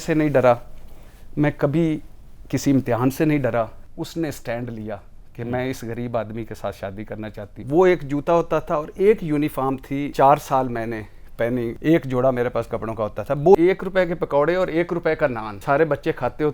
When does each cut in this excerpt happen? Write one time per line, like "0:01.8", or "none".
0:03.8
0:07.6
0:10.1
0:11.8
0:13.5
0:15.5